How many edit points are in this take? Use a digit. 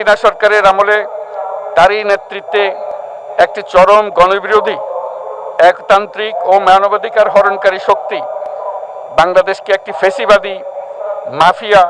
0